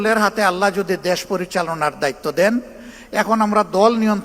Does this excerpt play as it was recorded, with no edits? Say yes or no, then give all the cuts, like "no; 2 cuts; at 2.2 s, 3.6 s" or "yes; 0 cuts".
yes; 0 cuts